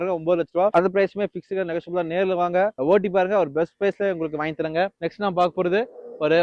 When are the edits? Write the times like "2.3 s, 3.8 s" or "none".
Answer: none